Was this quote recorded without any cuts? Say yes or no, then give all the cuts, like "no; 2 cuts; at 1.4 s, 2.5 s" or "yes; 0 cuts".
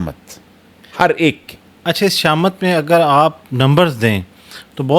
yes; 0 cuts